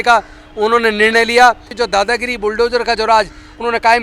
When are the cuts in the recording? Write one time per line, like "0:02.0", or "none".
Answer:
0:01.7